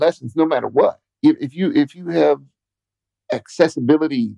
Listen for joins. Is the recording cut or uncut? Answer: cut